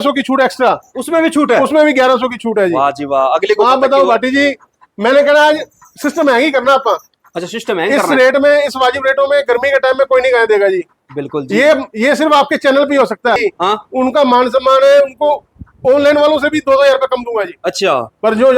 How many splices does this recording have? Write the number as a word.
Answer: one